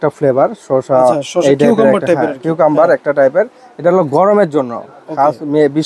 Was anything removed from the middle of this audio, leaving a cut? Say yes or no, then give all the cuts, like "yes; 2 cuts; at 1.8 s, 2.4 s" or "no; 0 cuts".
no; 0 cuts